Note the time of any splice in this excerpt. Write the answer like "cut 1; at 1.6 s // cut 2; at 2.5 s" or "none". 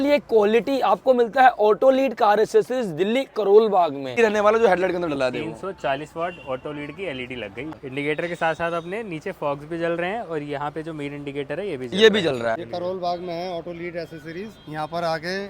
cut 1; at 4.1 s // cut 2; at 7.8 s // cut 3; at 12.7 s